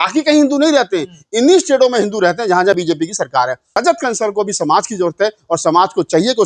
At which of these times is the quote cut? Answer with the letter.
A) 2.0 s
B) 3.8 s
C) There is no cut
B